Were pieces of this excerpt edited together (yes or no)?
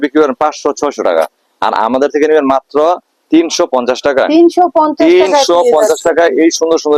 no